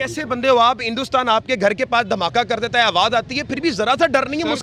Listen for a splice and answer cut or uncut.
uncut